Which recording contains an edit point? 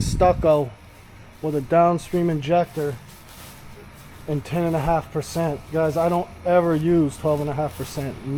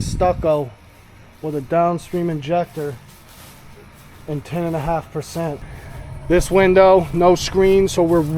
second; 1 cut; at 5.6 s

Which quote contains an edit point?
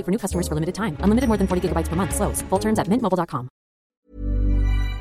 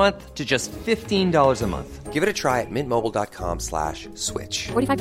first; 1 cut; at 3.9 s

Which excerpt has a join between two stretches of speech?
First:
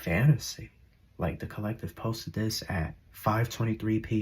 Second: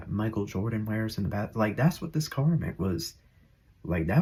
first; 1 cut; at 3.0 s

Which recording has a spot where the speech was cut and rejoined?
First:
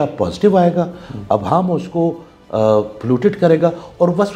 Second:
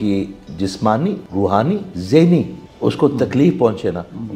second; 2 cuts; at 1.6 s, 2.6 s

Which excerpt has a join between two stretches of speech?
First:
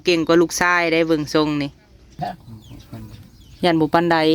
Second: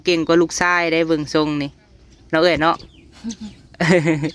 first; 1 cut; at 2.2 s

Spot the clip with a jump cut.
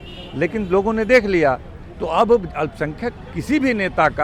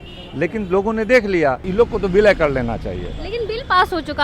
second; 1 cut; at 1.6 s

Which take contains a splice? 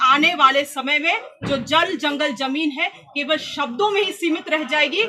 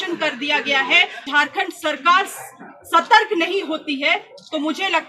second; 1 cut; at 1.2 s

